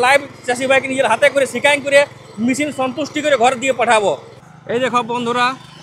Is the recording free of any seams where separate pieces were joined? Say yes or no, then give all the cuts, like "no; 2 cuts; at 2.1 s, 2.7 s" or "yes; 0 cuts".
no; 1 cut; at 4.3 s